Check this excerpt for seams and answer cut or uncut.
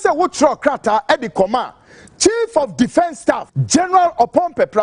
cut